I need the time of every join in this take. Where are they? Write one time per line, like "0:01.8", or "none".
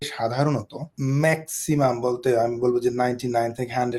0:00.9